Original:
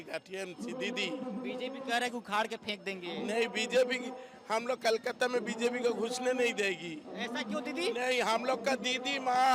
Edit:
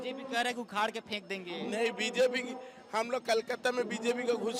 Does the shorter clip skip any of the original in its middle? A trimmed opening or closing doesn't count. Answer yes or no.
no